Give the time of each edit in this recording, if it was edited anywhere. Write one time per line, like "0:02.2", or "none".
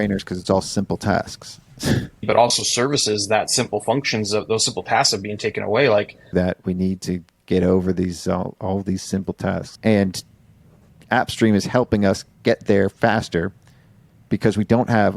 0:02.2
0:06.3
0:09.7
0:10.9

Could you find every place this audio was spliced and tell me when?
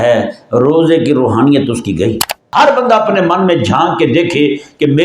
0:02.4

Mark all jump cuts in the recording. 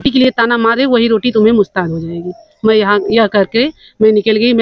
none

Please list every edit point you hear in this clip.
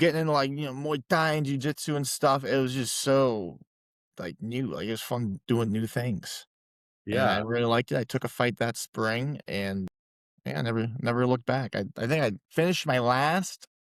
none

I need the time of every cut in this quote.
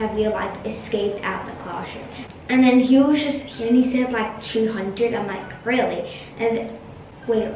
none

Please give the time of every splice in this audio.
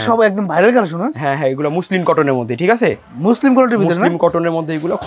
none

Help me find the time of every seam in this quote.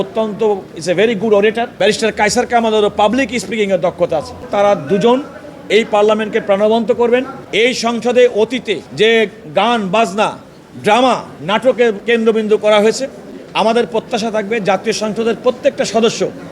0:01.5
0:04.5
0:07.4
0:08.9
0:12.0

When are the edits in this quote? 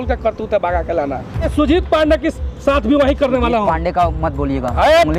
0:01.5

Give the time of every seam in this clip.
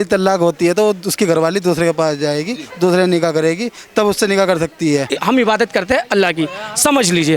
0:05.1

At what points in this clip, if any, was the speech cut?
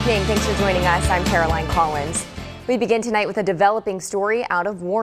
none

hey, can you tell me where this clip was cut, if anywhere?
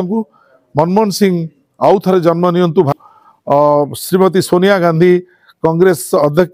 0:02.9

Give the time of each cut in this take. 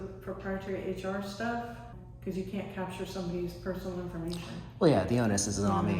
0:01.9

